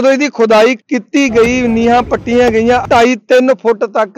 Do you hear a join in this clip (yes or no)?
yes